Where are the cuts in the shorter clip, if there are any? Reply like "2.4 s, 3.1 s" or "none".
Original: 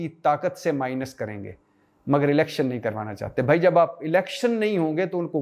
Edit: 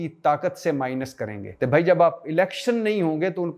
1.4 s